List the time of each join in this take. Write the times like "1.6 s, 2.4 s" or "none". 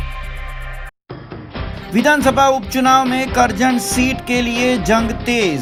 none